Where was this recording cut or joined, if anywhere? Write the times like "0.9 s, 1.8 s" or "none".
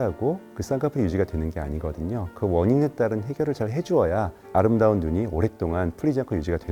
none